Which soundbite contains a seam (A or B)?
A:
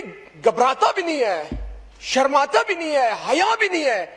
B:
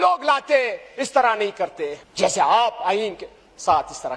B